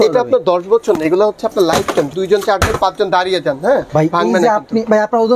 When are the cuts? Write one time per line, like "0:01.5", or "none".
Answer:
0:02.1
0:03.9